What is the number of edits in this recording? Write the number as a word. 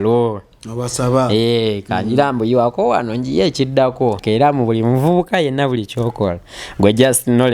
one